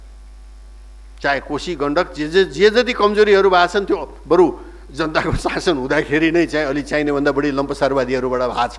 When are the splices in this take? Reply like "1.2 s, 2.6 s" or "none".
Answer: none